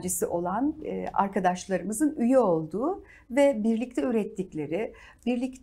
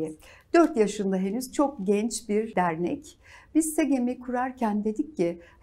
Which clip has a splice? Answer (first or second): second